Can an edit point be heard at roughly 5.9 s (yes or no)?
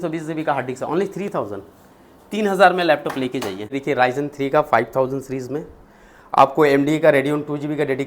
no